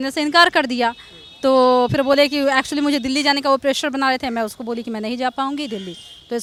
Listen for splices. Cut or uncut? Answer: uncut